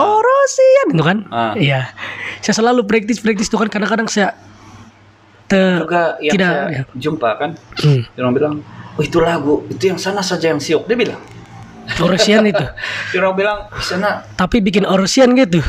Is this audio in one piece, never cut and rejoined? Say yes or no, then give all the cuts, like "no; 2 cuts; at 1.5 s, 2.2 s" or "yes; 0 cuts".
no; 1 cut; at 2.0 s